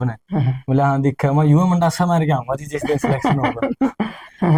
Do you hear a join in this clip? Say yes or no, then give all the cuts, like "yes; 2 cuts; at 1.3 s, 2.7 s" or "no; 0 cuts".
no; 0 cuts